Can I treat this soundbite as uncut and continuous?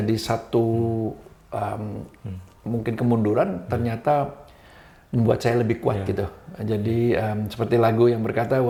yes; 0 cuts

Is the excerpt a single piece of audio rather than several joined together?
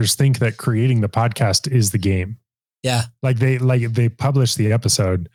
yes; 0 cuts

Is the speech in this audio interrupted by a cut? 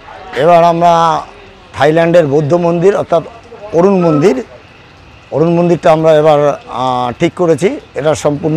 no; 0 cuts

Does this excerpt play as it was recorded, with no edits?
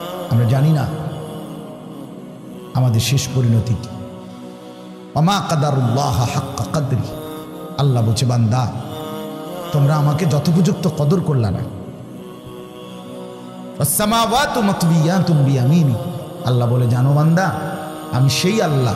no; 6 cuts; at 0.9 s, 2.7 s, 3.8 s, 5.1 s, 11.6 s, 13.8 s

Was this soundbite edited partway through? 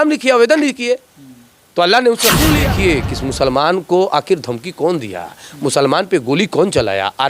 yes; 1 cut; at 2.6 s

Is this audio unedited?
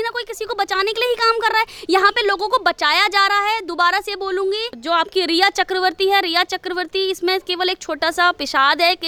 yes; 0 cuts

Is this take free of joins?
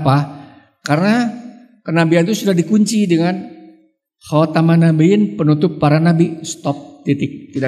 yes; 0 cuts

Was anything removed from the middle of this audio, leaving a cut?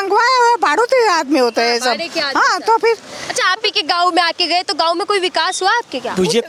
no; 0 cuts

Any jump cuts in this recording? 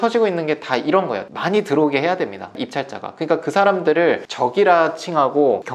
yes; 1 cut; at 1.3 s

